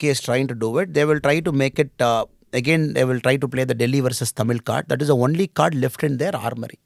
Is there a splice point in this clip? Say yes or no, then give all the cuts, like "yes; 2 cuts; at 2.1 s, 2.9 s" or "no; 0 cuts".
no; 0 cuts